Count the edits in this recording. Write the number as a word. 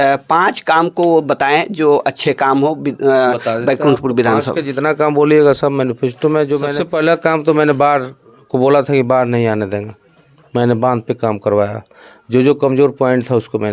one